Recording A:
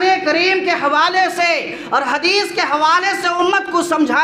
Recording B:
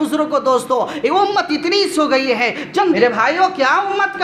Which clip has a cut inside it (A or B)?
B